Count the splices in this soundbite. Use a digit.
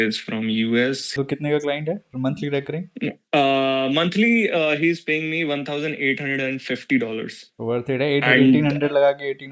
1